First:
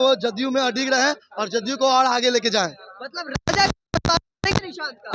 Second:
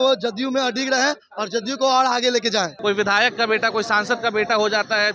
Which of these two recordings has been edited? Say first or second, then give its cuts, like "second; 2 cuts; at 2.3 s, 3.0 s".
second; 1 cut; at 2.7 s